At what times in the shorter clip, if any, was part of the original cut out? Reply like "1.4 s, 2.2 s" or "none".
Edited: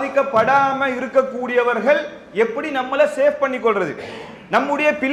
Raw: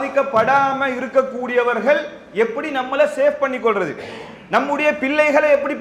none